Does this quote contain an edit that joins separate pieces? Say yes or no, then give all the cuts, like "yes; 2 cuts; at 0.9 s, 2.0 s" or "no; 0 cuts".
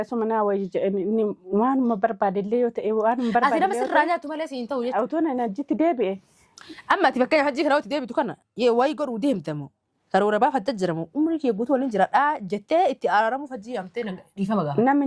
yes; 1 cut; at 4.9 s